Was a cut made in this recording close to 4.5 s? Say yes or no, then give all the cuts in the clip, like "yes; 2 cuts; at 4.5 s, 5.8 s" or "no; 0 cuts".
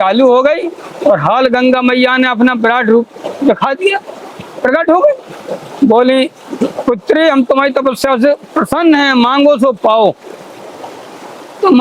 no; 0 cuts